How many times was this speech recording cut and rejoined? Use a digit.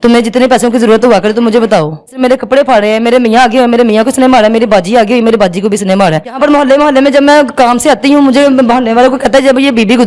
2